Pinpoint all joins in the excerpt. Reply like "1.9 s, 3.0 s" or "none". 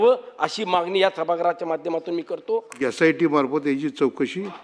2.7 s